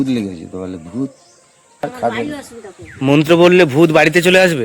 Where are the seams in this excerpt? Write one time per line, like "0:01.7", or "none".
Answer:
0:01.8

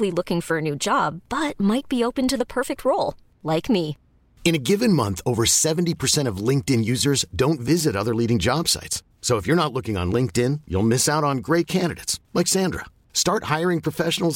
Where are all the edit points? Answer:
none

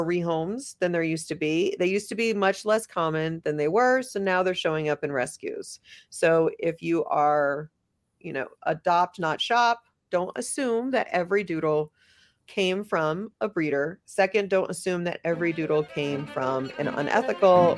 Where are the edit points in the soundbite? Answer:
none

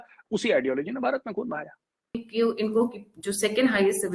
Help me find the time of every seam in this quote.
0:02.3

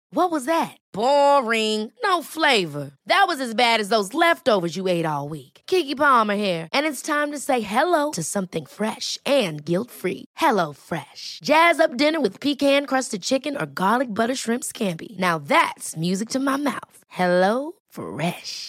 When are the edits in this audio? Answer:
none

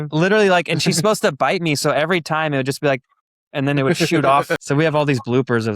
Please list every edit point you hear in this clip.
0:04.6

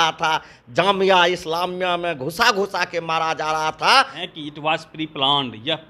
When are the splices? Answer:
0:04.2

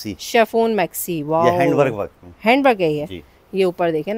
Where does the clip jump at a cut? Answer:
none

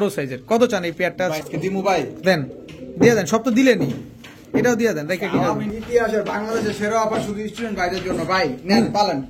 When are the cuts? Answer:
0:01.4
0:05.7

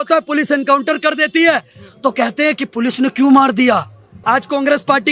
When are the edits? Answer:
0:04.1

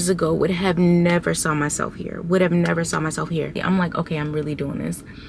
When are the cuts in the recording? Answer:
0:03.6

